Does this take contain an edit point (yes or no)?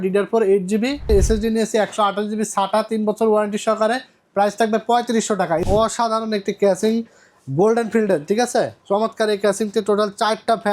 yes